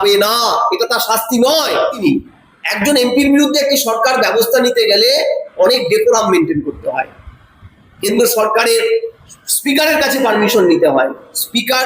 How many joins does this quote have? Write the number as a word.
one